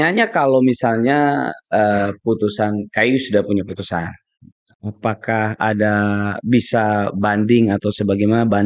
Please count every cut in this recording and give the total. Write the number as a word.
zero